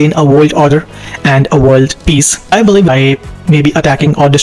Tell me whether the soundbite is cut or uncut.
cut